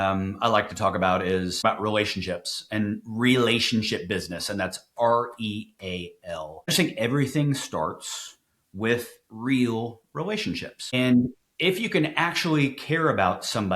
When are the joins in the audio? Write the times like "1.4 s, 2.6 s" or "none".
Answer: 1.6 s, 6.7 s, 10.9 s